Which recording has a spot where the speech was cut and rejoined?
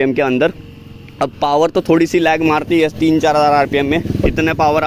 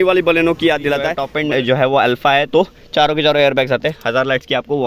second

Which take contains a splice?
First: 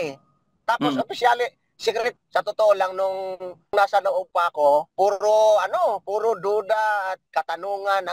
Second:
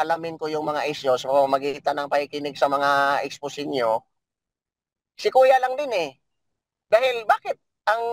first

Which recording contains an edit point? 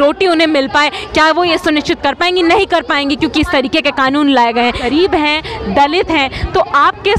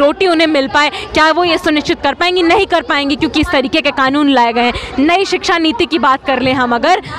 first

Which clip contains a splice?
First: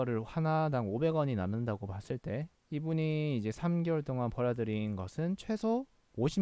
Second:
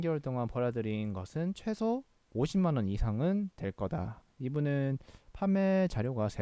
second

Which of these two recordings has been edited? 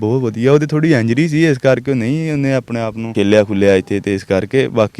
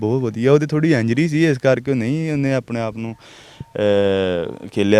first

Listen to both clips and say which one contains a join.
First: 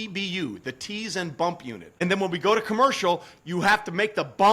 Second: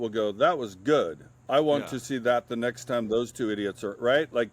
first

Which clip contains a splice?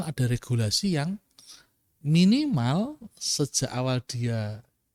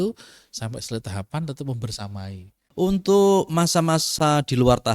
second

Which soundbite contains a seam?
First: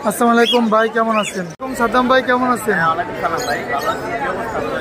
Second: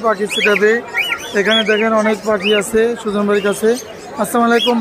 first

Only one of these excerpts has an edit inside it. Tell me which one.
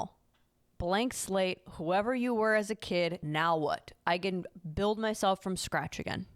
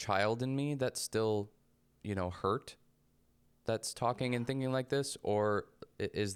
first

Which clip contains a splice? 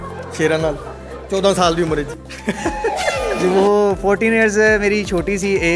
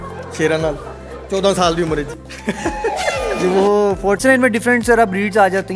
second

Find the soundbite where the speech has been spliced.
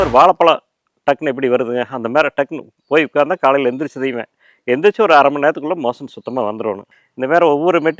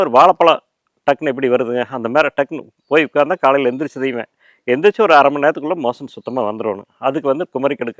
first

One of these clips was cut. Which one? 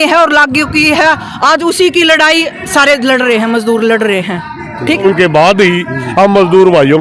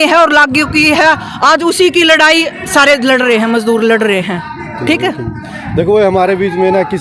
first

